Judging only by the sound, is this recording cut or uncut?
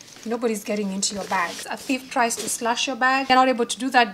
cut